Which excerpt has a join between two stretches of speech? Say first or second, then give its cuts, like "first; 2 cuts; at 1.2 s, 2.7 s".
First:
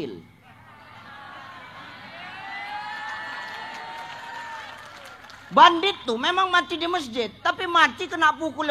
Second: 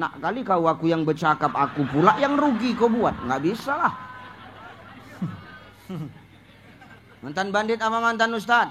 second; 1 cut; at 5.7 s